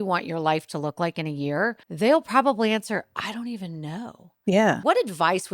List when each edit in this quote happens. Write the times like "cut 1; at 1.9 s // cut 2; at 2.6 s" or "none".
cut 1; at 1.8 s // cut 2; at 4.8 s